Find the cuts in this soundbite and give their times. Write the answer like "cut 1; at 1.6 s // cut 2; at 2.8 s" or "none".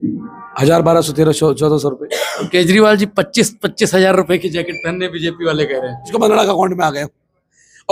cut 1; at 6.1 s